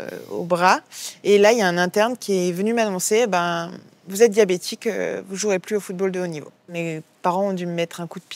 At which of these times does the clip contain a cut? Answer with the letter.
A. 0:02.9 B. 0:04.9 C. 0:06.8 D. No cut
C